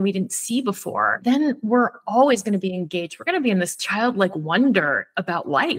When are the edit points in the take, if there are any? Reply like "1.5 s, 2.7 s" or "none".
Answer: 1.1 s